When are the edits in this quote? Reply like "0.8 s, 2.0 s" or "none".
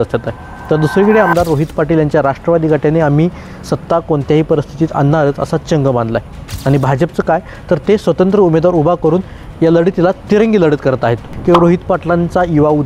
11.3 s